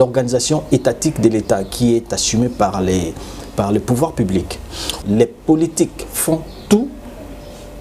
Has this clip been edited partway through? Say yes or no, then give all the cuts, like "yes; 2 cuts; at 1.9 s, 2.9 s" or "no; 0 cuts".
yes; 1 cut; at 4.9 s